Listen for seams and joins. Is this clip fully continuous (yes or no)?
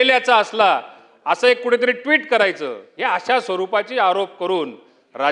no